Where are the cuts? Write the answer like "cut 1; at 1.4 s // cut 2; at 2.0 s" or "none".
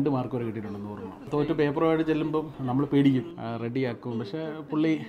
cut 1; at 1.2 s // cut 2; at 2.6 s // cut 3; at 3.3 s

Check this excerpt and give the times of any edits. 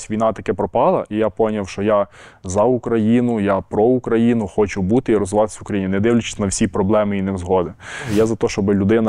cut 1; at 8.1 s

